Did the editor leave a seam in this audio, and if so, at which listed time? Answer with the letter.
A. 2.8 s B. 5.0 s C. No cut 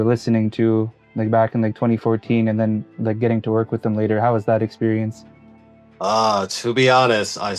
C